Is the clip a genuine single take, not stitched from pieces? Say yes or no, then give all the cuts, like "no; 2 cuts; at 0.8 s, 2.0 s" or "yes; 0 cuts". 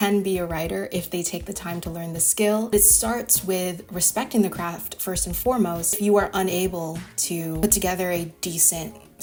yes; 0 cuts